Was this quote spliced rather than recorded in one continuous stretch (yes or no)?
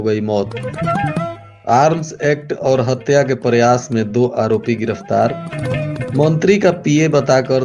no